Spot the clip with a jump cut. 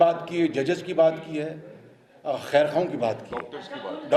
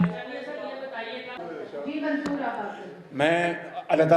second; 1 cut; at 1.3 s

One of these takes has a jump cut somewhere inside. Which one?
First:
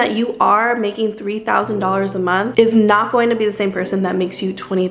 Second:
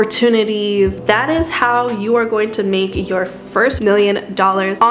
second; 2 cuts; at 0.9 s, 3.8 s

